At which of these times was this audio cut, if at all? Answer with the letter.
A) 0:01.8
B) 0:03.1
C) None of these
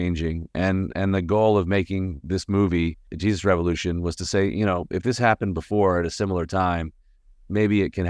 B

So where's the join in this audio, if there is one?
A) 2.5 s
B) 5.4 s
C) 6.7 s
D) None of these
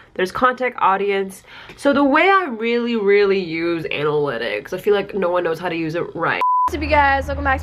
C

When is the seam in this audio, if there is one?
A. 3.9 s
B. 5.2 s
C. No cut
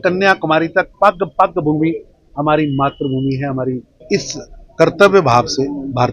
A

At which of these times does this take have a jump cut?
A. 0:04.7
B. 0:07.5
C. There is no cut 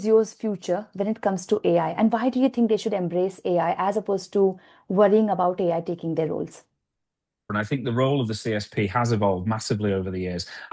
B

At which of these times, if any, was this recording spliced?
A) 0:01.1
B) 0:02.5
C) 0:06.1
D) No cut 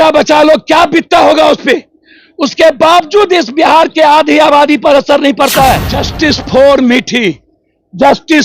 C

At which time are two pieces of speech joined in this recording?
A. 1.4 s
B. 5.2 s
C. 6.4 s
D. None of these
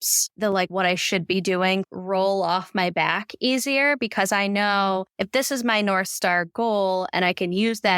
B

